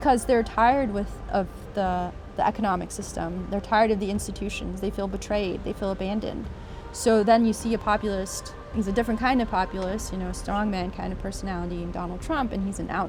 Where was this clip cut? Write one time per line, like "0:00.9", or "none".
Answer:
none